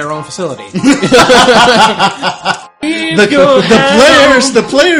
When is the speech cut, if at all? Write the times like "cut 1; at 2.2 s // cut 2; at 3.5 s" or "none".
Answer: cut 1; at 2.8 s